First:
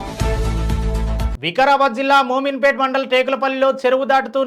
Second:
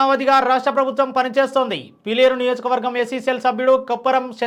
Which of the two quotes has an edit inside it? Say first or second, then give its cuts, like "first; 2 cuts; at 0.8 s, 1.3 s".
first; 1 cut; at 1.3 s